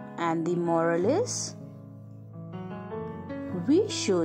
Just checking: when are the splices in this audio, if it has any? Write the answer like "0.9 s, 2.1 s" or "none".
1.6 s, 3.5 s